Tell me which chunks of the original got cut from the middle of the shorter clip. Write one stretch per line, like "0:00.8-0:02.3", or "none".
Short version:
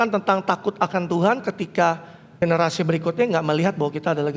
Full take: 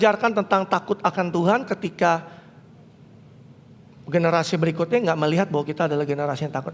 0:02.4-0:03.9